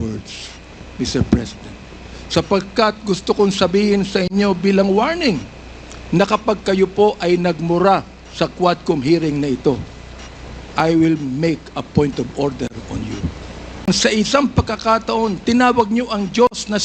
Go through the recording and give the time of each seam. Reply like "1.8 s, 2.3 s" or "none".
13.8 s